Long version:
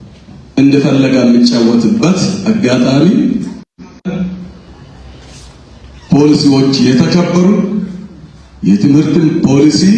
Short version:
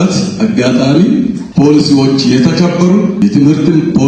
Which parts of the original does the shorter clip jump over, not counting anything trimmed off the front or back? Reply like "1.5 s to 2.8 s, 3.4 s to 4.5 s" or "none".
3.5 s to 6.0 s, 7.8 s to 8.7 s